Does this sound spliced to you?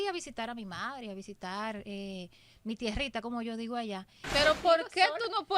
yes; 1 cut; at 4.2 s

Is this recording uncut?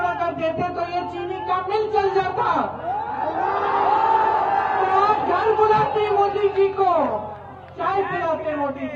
yes; 0 cuts

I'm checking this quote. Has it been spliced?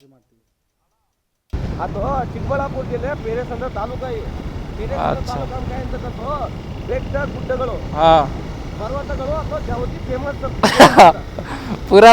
yes; 1 cut; at 1.4 s

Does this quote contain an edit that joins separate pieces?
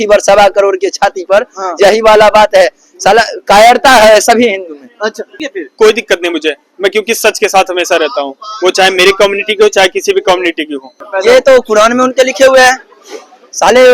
yes; 2 cuts; at 5.3 s, 11.0 s

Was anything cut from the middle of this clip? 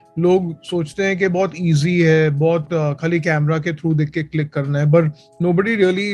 no; 0 cuts

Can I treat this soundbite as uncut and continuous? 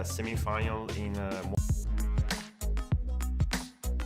no; 1 cut; at 1.5 s

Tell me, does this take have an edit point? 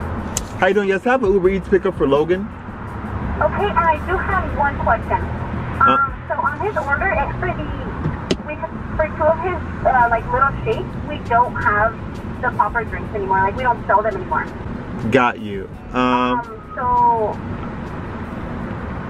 no; 0 cuts

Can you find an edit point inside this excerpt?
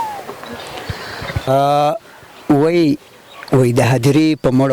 yes; 1 cut; at 1.5 s

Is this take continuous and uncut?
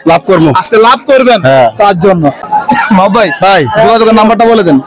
yes; 0 cuts

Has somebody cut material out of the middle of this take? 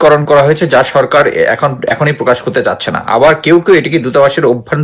no; 0 cuts

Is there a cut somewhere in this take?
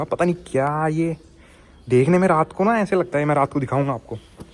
no; 0 cuts

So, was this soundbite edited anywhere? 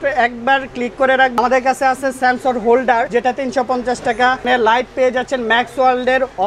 yes; 3 cuts; at 1.3 s, 3.1 s, 4.4 s

